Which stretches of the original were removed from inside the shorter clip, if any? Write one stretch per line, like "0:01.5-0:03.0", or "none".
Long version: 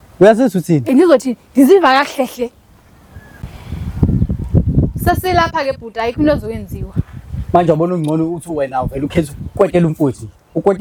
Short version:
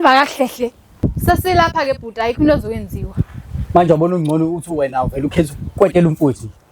0:02.8-0:04.8